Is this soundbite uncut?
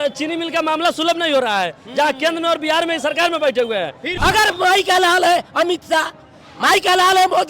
no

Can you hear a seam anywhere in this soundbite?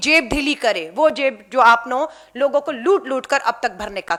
no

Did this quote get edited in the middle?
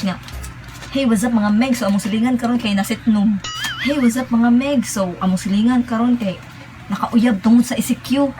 no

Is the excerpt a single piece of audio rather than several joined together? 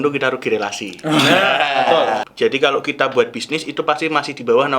no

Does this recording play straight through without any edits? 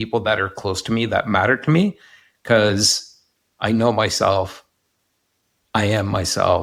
yes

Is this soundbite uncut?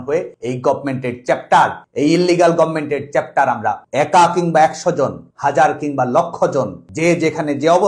no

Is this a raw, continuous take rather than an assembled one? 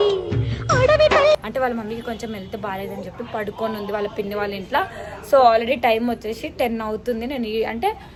yes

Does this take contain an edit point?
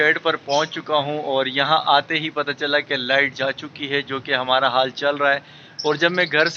no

